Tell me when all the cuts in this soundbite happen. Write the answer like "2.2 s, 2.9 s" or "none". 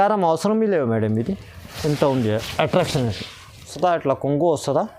3.7 s